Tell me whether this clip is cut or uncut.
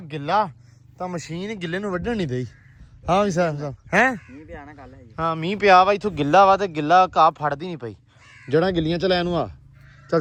uncut